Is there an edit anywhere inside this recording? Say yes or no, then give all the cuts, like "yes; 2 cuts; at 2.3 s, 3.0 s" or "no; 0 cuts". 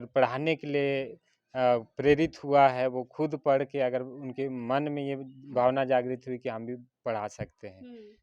no; 0 cuts